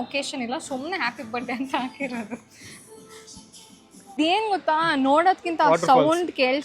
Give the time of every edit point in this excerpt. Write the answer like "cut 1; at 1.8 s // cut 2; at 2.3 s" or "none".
cut 1; at 4.2 s